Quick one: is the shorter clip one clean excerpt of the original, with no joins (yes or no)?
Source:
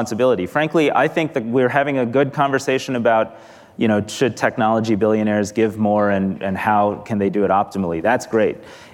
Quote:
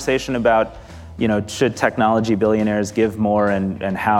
yes